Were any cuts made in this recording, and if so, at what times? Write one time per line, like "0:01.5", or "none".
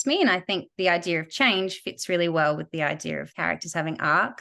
0:03.3